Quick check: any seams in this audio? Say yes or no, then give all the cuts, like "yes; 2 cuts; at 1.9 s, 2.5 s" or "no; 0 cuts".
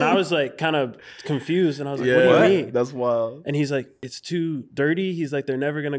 yes; 1 cut; at 4.0 s